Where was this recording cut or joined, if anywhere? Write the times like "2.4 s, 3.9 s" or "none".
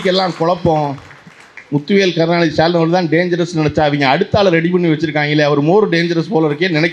none